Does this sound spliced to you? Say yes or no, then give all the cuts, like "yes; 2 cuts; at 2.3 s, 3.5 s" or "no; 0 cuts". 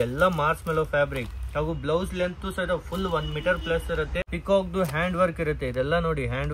yes; 1 cut; at 4.3 s